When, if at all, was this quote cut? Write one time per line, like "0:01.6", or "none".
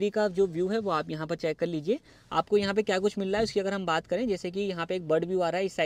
none